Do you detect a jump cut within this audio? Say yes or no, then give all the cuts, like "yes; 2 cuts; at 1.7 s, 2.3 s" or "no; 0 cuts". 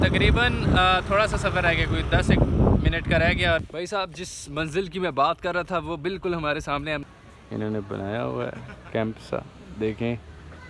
yes; 2 cuts; at 3.7 s, 7.0 s